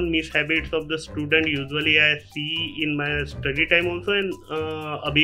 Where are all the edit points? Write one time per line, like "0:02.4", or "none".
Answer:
none

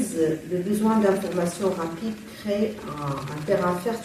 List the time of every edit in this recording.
none

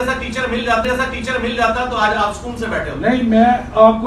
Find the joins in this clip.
0:00.9
0:03.1

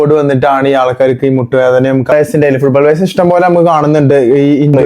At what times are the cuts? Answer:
0:02.1

